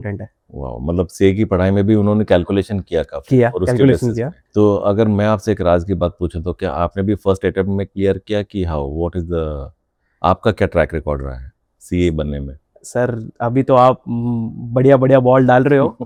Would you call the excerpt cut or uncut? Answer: uncut